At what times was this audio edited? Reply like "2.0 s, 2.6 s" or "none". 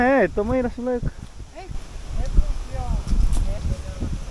1.7 s, 3.6 s